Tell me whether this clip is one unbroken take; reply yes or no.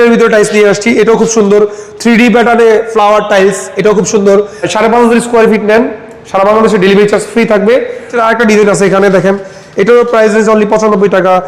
no